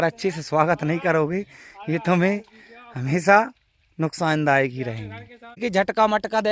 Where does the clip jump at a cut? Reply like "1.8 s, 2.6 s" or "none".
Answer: 5.6 s